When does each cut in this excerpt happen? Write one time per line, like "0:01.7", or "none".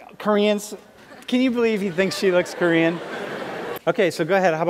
0:03.6